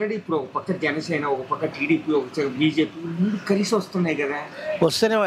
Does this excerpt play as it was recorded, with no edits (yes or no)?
yes